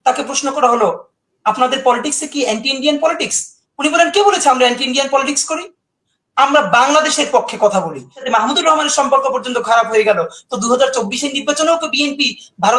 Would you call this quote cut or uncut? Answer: cut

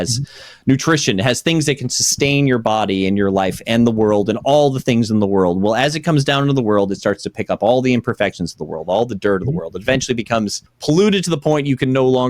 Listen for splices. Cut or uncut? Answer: cut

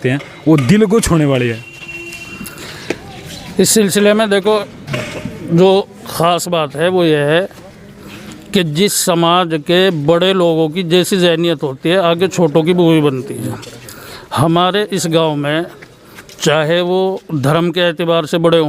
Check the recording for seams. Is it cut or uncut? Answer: uncut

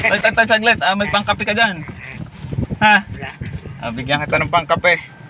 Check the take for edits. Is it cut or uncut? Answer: uncut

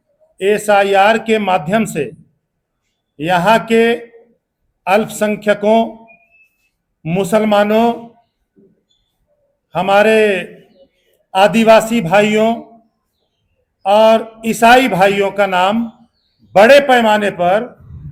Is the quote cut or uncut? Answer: uncut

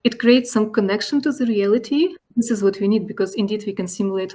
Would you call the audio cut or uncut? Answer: cut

